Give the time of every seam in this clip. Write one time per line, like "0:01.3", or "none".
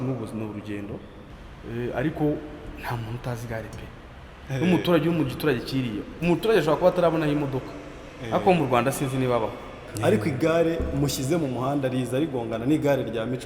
0:01.2
0:09.8